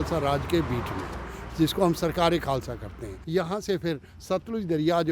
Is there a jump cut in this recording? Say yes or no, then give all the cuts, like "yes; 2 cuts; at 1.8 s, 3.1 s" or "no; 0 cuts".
yes; 1 cut; at 3.2 s